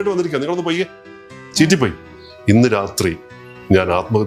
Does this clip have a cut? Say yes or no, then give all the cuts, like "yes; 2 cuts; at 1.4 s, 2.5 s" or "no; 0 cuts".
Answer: yes; 1 cut; at 2.1 s